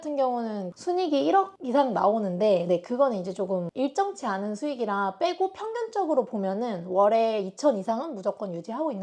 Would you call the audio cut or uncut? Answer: uncut